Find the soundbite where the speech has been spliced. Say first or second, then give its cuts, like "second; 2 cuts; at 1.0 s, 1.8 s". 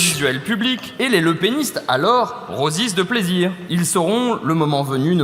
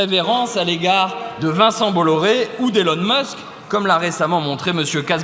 first; 2 cuts; at 0.9 s, 3.6 s